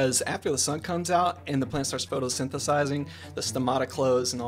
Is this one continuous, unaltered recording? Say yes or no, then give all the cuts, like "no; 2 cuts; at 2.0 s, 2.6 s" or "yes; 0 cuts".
yes; 0 cuts